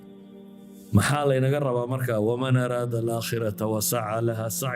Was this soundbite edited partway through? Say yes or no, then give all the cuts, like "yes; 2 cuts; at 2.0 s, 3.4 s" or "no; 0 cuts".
no; 0 cuts